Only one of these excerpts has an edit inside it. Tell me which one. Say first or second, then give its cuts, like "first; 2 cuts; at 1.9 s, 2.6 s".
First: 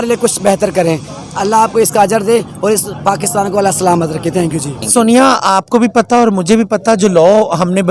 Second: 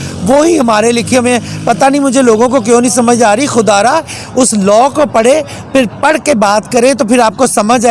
first; 1 cut; at 4.8 s